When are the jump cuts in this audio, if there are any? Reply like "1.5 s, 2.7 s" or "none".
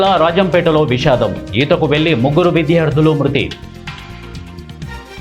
4.2 s